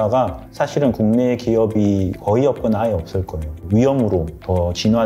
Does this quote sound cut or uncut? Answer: cut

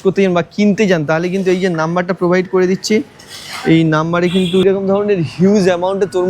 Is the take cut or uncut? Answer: cut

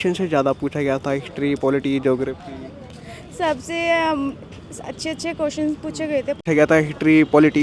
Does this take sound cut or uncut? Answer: cut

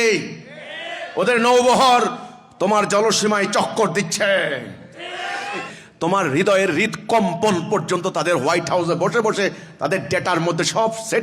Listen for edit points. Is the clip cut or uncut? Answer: cut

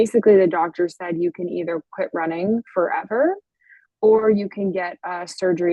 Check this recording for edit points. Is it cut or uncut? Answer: uncut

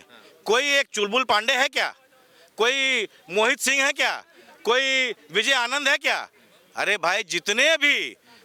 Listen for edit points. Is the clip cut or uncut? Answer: uncut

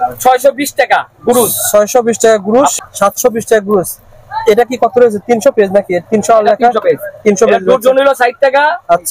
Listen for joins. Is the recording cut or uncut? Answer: cut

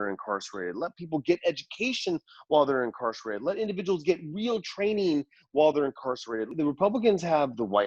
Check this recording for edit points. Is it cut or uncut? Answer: cut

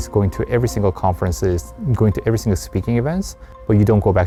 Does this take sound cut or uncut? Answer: uncut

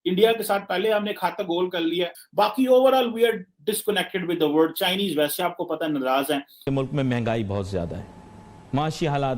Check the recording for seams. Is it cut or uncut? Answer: cut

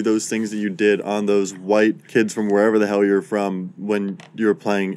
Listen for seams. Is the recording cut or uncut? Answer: uncut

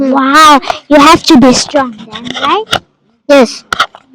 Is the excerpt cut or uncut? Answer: uncut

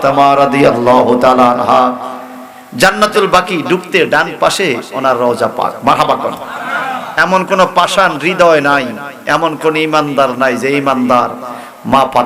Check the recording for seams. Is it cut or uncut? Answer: uncut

